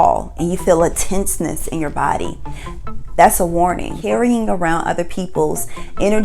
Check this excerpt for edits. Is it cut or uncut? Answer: cut